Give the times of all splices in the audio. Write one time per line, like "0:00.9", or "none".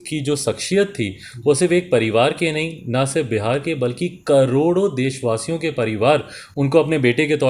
none